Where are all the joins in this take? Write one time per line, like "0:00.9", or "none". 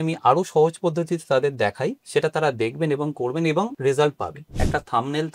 0:02.0
0:03.7
0:04.5